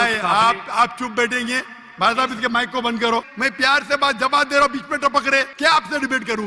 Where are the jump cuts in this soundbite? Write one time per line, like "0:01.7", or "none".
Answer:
0:03.3
0:05.5